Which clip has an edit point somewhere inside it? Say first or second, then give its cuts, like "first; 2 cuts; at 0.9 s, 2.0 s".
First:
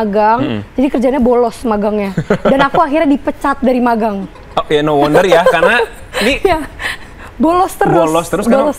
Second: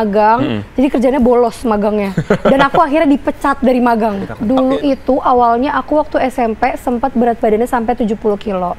second; 1 cut; at 4.3 s